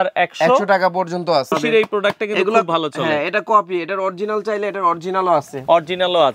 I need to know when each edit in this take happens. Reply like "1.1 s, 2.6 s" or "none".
1.5 s